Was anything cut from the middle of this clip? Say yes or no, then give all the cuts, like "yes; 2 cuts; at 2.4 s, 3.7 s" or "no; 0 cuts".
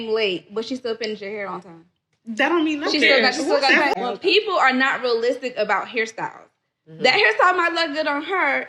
yes; 1 cut; at 3.9 s